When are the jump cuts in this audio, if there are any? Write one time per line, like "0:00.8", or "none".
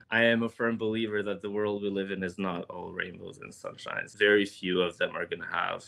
0:04.1